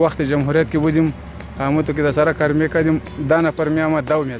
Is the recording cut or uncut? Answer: uncut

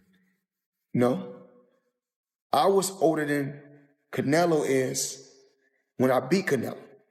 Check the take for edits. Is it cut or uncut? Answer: uncut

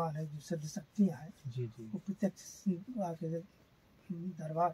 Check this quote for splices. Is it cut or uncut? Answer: uncut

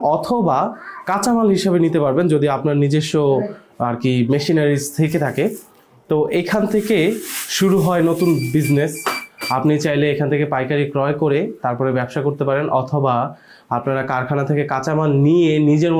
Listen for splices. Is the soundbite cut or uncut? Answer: uncut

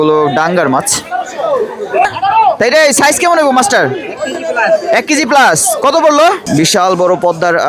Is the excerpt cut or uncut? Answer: cut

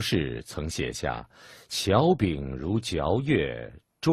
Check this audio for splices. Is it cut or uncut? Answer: uncut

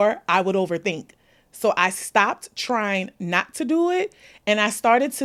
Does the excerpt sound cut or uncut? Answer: uncut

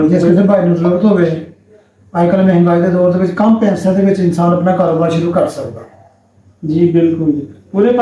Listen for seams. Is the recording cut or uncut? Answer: uncut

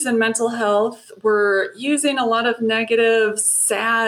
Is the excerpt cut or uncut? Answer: uncut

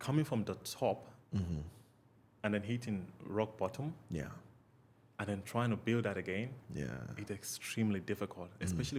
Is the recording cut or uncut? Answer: uncut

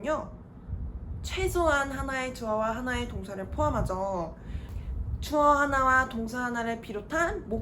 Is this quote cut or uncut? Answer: cut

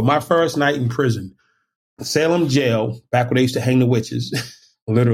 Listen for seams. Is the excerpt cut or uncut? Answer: cut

